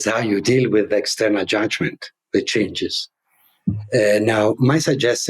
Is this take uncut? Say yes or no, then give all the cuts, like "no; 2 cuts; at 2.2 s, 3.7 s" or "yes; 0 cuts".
yes; 0 cuts